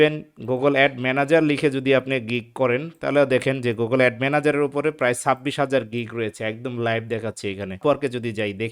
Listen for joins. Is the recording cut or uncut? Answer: cut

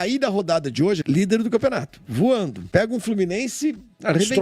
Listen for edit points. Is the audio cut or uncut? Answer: cut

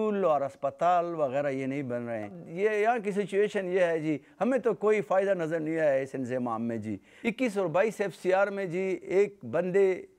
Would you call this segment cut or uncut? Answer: cut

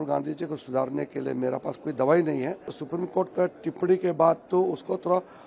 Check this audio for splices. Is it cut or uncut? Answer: cut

